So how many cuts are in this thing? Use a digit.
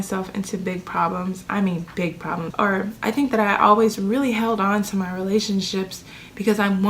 1